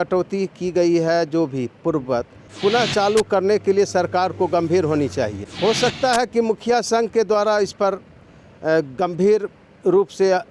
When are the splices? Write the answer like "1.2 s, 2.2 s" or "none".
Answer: 2.4 s, 5.4 s